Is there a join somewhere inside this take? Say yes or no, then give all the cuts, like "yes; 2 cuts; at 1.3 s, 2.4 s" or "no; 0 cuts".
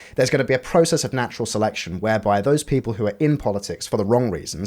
yes; 1 cut; at 3.8 s